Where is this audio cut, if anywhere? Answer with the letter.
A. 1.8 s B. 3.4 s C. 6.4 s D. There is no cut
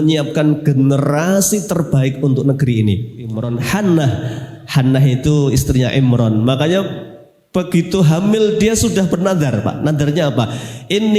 B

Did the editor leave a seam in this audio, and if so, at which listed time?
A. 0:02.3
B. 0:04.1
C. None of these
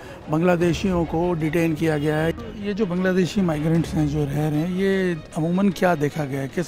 A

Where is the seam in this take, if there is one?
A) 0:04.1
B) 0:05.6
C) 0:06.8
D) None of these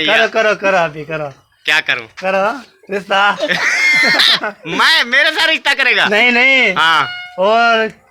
D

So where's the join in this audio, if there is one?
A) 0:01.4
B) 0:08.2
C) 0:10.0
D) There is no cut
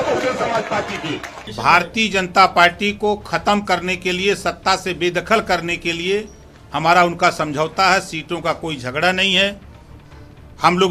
A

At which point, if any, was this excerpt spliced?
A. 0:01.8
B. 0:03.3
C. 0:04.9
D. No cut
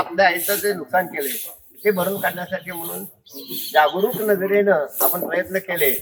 D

